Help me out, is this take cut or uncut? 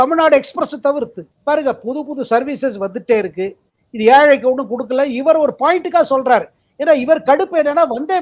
cut